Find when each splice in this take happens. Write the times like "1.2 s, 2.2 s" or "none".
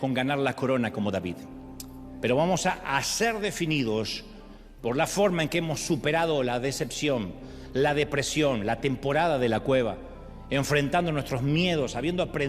none